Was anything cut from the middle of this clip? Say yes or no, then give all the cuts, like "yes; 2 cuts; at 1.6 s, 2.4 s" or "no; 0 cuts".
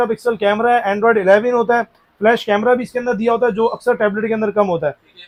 no; 0 cuts